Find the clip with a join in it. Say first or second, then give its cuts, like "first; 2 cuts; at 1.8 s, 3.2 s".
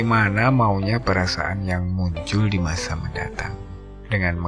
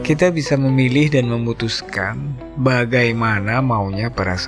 first; 1 cut; at 3.5 s